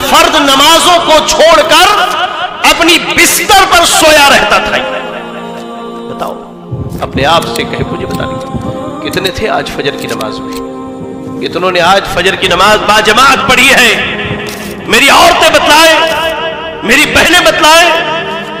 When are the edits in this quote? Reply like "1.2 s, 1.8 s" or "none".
none